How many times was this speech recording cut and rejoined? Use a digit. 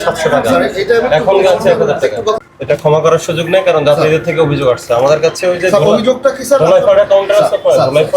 1